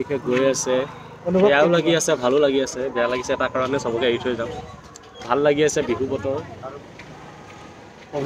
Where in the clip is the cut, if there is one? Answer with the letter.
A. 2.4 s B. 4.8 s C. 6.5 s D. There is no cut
C